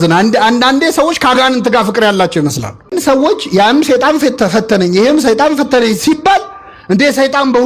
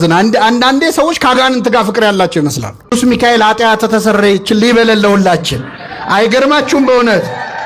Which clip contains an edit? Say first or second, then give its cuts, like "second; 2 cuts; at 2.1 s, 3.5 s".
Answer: second; 1 cut; at 2.9 s